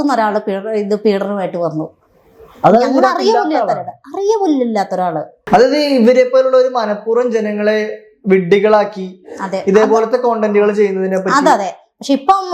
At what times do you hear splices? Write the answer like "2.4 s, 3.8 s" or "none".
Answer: 5.4 s